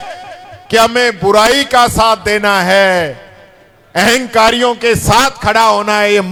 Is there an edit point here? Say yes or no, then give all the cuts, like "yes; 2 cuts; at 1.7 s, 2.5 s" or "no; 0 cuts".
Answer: no; 0 cuts